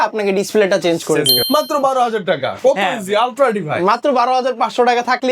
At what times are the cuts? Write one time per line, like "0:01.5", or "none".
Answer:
0:01.4